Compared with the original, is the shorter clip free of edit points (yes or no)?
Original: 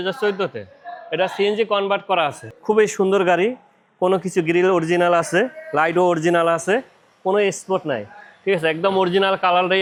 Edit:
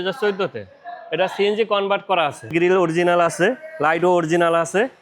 no